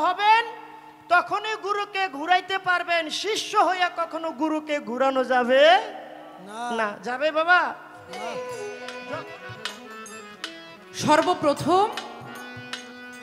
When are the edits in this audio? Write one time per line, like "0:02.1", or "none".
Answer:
0:08.3